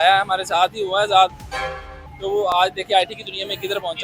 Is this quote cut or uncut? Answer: cut